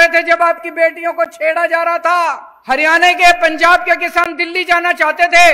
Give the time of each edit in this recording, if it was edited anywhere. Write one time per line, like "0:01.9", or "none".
0:02.5